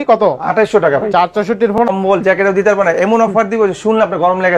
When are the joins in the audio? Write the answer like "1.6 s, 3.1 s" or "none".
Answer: 1.8 s